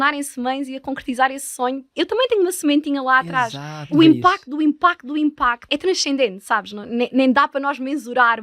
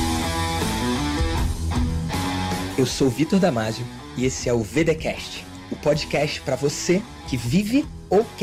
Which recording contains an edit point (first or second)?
first